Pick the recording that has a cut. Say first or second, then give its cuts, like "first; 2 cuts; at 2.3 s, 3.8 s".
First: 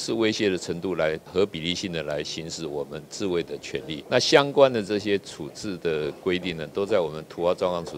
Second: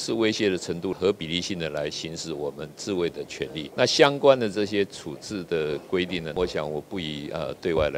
second; 2 cuts; at 0.9 s, 6.3 s